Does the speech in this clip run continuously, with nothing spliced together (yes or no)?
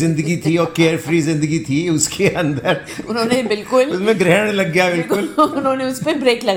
yes